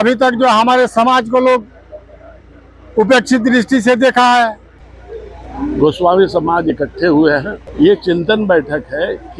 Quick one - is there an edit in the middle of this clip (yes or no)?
yes